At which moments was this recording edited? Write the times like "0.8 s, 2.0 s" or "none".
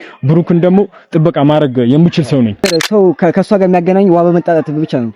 2.7 s